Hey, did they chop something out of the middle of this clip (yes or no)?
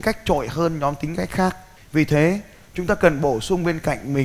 yes